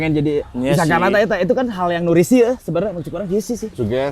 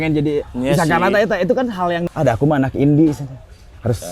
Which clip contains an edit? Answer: second; 1 cut; at 2.0 s

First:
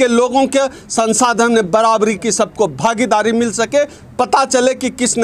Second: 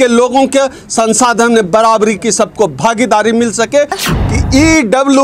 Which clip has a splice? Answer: second; 1 cut; at 4.0 s

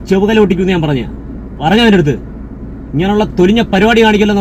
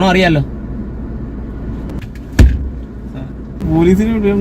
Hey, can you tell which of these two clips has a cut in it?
second; 2 cuts; at 2.0 s, 3.6 s

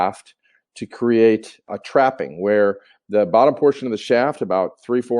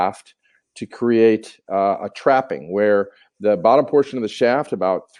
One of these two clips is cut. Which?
first; 1 cut; at 1.7 s

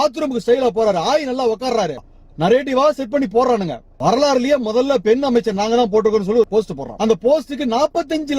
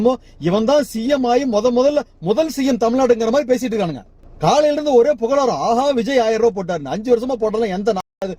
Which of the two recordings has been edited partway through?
first; 3 cuts; at 2.0 s, 3.9 s, 6.5 s

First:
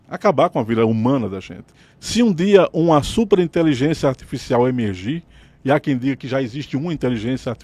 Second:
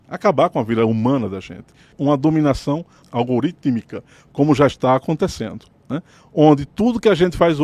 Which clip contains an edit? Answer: second; 1 cut; at 1.9 s

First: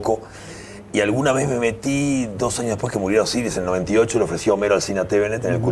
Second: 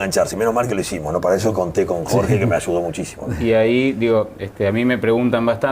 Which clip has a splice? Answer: second; 1 cut; at 2.1 s

